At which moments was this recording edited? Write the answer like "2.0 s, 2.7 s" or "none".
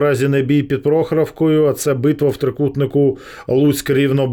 none